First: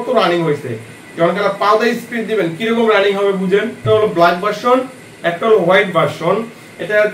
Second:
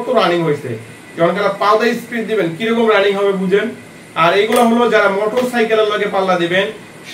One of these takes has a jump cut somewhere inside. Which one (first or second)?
first